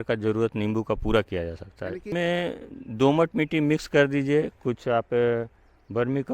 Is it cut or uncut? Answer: cut